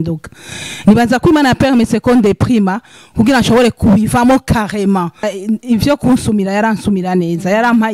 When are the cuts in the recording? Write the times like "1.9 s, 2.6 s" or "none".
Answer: 5.3 s